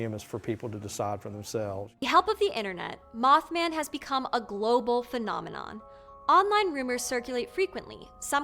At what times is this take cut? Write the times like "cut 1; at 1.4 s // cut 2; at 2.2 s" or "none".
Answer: cut 1; at 2.0 s